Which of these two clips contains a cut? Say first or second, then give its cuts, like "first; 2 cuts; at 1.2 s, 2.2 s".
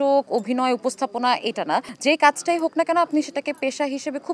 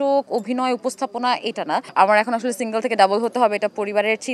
second; 1 cut; at 1.9 s